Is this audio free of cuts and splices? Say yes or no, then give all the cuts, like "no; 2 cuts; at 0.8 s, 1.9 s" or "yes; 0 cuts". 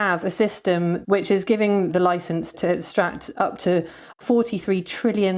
no; 1 cut; at 1.0 s